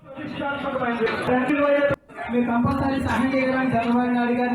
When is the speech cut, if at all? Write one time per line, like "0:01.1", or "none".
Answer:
0:01.9